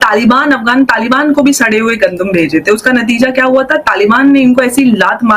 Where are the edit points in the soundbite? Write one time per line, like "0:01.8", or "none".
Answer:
none

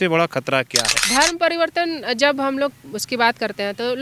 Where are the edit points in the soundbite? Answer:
0:00.9

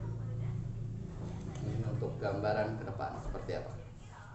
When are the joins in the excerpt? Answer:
none

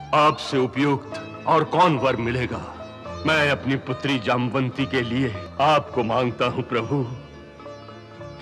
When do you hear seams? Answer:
0:03.0
0:05.4

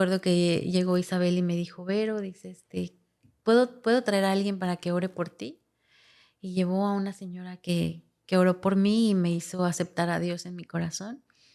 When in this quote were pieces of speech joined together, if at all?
none

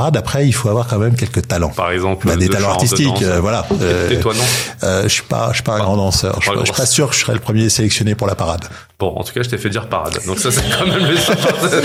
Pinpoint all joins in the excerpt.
none

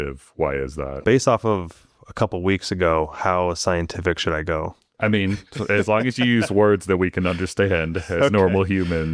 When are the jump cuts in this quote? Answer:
0:01.0
0:04.8

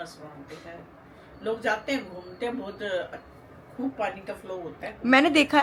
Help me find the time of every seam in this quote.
none

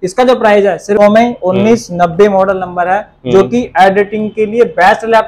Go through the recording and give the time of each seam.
0:01.0

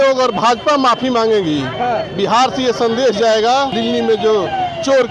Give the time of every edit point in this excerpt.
0:03.7

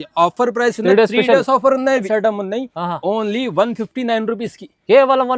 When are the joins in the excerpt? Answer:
0:02.0

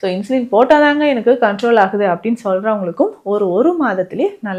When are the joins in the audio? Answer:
none

